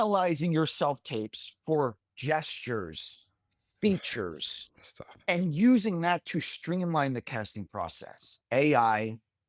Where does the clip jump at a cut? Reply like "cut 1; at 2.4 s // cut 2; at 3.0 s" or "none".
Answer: cut 1; at 8.3 s